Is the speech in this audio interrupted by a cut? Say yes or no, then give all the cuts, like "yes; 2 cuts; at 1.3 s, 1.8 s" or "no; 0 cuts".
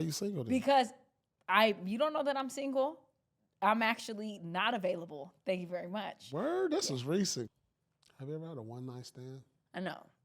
yes; 1 cut; at 7.5 s